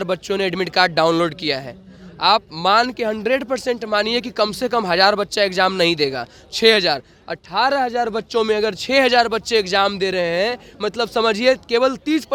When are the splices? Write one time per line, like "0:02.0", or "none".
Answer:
none